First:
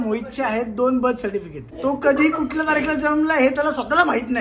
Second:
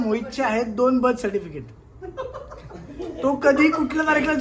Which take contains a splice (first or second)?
first